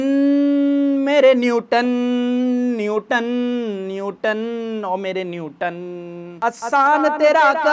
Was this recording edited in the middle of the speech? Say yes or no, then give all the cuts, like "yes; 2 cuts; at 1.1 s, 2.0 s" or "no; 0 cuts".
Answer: yes; 1 cut; at 6.3 s